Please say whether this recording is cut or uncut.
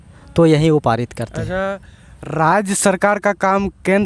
uncut